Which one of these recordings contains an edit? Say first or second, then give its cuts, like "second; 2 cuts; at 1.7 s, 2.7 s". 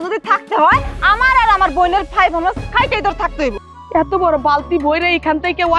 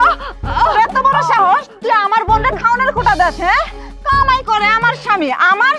first; 1 cut; at 3.7 s